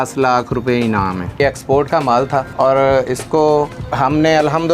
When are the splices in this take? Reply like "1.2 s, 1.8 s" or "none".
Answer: 1.4 s, 2.5 s, 3.8 s